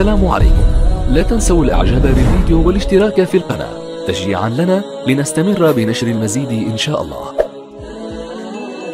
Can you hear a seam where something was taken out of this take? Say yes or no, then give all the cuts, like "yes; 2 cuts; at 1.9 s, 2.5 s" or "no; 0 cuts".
yes; 1 cut; at 7.5 s